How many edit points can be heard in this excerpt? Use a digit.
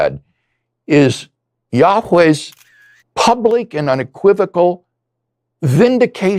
0